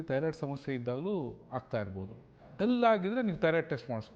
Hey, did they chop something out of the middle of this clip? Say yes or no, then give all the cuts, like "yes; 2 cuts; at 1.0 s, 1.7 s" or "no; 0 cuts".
yes; 1 cut; at 2.5 s